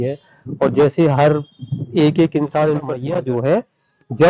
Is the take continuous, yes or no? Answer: no